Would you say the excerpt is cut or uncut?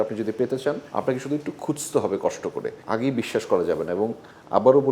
cut